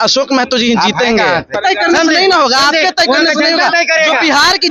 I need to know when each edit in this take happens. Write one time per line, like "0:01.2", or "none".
0:01.6

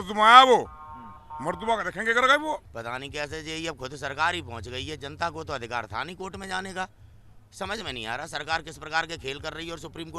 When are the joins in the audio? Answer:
0:02.8

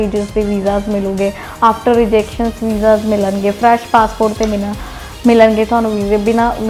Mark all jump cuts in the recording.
none

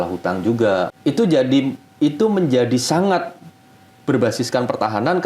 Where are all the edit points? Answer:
0:00.9

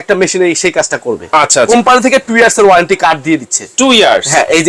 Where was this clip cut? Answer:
0:01.7

